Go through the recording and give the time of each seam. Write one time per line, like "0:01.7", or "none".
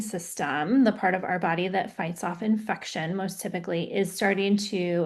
none